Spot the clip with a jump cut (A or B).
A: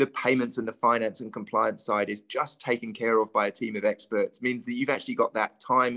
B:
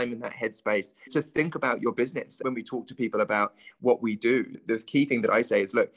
B